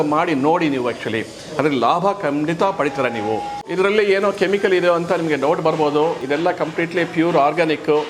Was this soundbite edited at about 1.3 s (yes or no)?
no